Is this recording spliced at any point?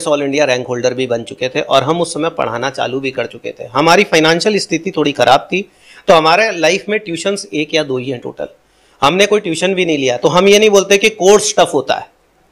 no; 0 cuts

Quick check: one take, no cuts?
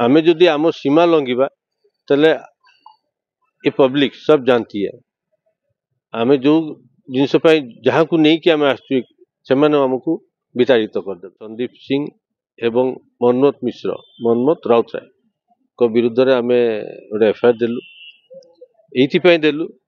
no; 1 cut; at 11.7 s

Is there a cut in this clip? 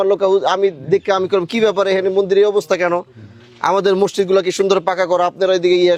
no; 0 cuts

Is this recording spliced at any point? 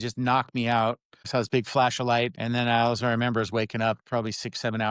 yes; 2 cuts; at 1.1 s, 2.4 s

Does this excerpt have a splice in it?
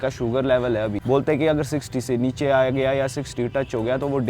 yes; 1 cut; at 1.0 s

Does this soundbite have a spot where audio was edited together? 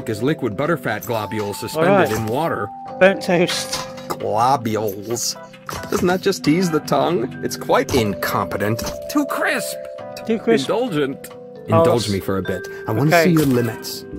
no; 0 cuts

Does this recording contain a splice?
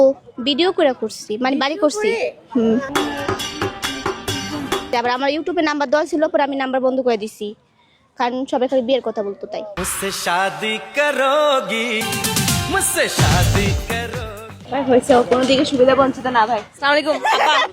yes; 2 cuts; at 4.9 s, 12.0 s

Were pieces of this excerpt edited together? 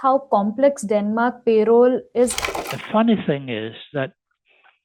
yes; 1 cut; at 2.4 s

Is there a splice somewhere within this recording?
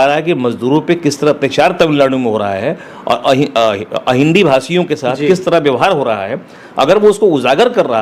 no; 0 cuts

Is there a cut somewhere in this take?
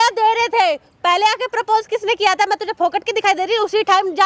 no; 0 cuts

